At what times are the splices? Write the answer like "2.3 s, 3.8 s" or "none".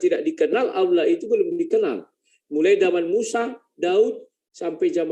none